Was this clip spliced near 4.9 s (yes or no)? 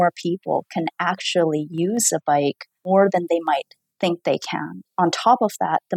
yes